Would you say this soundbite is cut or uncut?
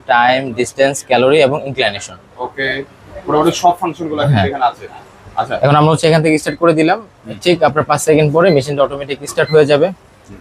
uncut